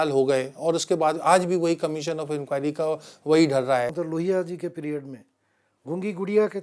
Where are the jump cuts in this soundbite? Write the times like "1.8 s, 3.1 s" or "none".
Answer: 3.9 s